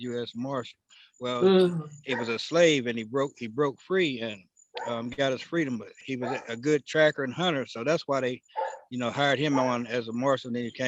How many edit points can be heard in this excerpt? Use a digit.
1